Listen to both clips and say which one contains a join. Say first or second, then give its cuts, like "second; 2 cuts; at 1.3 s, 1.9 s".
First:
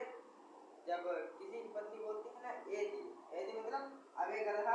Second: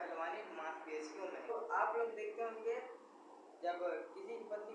second; 1 cut; at 1.5 s